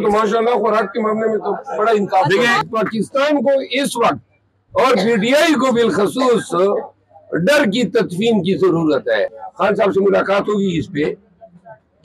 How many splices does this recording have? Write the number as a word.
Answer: two